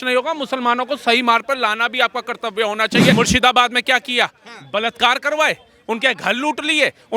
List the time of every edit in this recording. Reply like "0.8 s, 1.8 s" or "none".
3.1 s